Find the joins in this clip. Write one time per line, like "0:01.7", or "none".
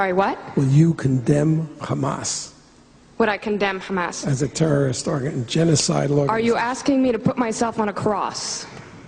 0:06.8